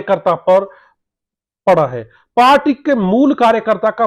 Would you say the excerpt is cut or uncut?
uncut